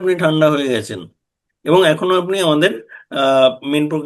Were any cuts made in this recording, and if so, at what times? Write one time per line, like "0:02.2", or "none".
none